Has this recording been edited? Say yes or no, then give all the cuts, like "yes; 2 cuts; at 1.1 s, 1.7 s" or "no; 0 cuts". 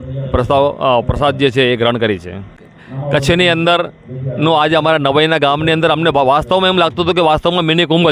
no; 0 cuts